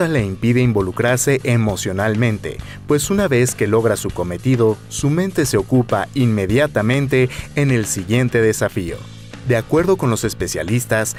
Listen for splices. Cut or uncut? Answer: uncut